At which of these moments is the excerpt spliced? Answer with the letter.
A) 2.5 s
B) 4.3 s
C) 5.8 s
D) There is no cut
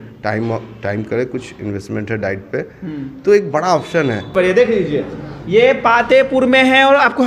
B